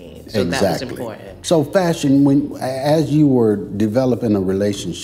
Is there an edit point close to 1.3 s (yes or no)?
yes